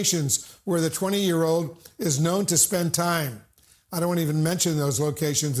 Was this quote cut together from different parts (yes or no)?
no